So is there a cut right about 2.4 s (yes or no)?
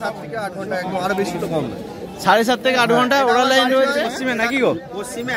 no